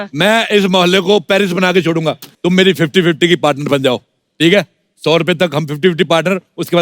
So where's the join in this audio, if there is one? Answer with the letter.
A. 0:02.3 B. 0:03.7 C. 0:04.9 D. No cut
A